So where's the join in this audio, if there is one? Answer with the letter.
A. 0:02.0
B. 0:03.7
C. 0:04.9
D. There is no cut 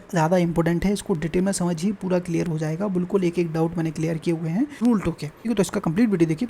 C